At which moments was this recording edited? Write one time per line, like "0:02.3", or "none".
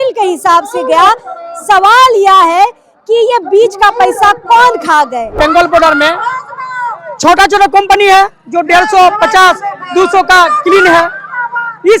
0:05.3